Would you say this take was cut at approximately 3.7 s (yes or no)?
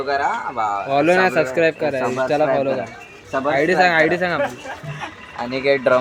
no